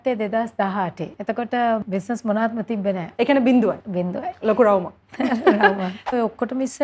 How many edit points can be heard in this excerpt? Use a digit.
5